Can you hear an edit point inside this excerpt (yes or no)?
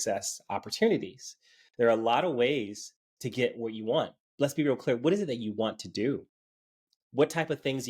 no